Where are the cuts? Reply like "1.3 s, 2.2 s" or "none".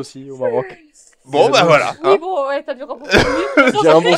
none